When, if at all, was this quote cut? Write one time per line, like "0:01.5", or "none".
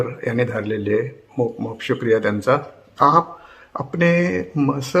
0:02.8